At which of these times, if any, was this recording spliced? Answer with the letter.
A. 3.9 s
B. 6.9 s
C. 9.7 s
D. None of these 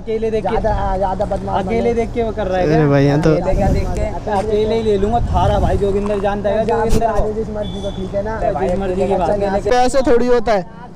C